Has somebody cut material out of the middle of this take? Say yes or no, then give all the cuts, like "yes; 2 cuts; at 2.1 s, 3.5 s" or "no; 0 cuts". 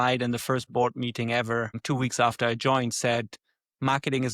no; 0 cuts